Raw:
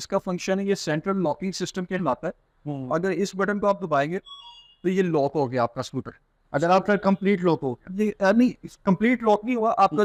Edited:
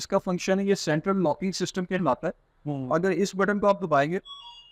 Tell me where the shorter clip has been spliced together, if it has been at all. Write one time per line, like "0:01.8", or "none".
none